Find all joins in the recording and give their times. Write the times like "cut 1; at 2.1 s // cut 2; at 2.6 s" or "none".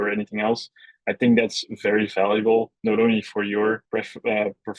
cut 1; at 3.8 s